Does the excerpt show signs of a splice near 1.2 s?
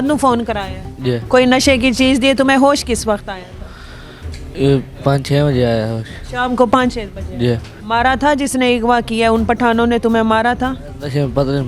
yes; 2 cuts; at 1.2 s, 7.7 s

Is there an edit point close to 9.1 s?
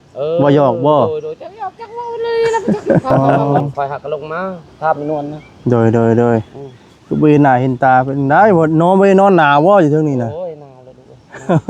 no; 1 cut; at 3.3 s

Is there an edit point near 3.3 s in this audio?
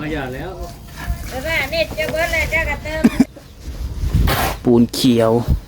yes; 1 cut; at 3.3 s

